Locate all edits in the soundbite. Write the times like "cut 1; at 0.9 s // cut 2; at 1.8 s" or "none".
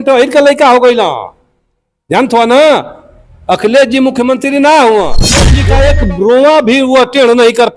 cut 1; at 5.6 s